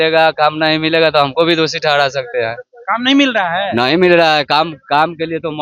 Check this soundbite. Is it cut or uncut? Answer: uncut